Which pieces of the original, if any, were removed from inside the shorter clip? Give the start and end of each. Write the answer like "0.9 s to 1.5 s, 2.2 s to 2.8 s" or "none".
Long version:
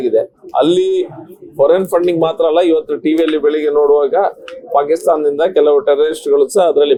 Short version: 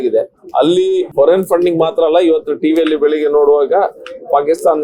1.1 s to 1.5 s

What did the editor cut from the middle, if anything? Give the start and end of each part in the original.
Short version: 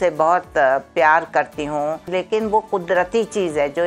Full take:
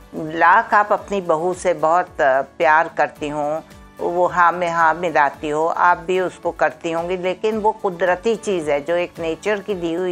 3.7 s to 7.2 s

